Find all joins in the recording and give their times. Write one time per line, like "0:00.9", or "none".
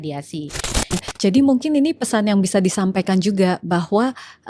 0:00.9